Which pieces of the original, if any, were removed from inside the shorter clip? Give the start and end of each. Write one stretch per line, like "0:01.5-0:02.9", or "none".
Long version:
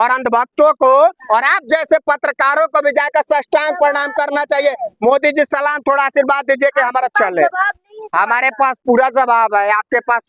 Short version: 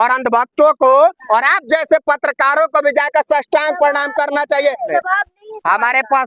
0:04.9-0:07.4